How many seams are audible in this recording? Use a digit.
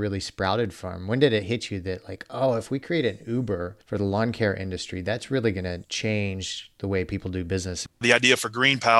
3